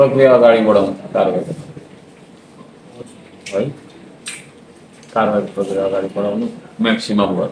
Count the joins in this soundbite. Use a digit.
0